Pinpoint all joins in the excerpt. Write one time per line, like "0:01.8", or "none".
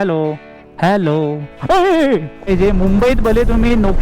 0:02.5